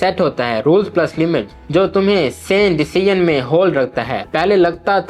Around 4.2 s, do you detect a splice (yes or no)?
yes